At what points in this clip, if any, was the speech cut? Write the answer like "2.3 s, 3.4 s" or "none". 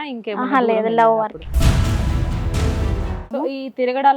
1.5 s, 3.2 s